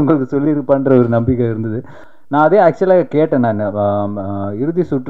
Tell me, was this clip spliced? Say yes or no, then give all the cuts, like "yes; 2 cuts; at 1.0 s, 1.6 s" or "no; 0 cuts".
yes; 1 cut; at 2.0 s